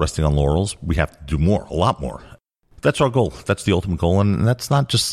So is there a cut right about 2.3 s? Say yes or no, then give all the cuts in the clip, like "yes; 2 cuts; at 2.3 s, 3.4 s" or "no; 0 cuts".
yes; 1 cut; at 2.3 s